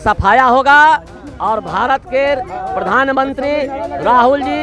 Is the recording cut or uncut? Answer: uncut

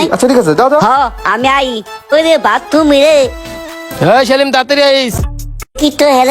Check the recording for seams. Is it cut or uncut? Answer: cut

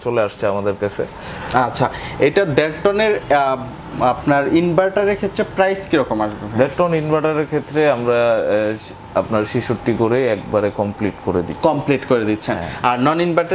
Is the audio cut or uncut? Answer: uncut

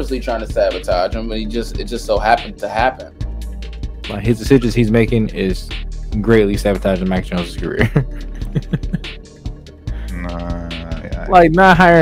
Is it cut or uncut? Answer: uncut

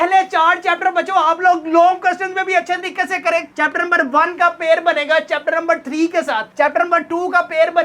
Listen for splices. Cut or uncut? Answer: cut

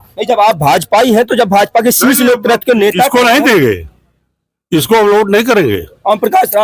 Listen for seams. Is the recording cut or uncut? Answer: uncut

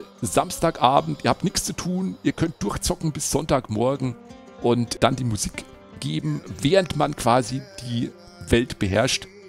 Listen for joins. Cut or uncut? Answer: cut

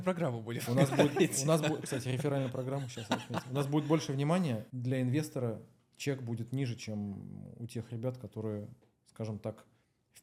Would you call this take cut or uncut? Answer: uncut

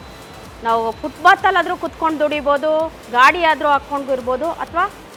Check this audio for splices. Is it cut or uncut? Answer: uncut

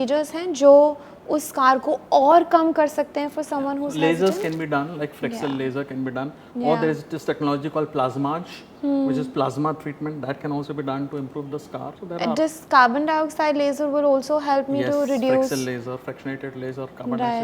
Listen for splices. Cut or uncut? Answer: uncut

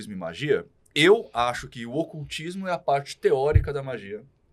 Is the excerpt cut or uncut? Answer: uncut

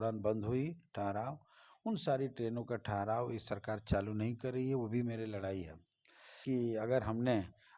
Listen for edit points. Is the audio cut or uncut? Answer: cut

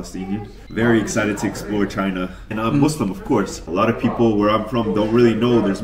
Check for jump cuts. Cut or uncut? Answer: cut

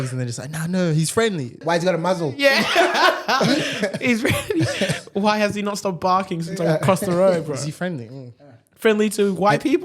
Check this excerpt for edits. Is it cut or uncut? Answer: cut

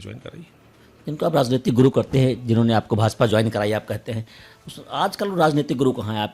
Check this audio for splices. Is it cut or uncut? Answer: uncut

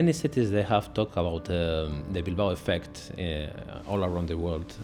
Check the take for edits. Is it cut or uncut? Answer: uncut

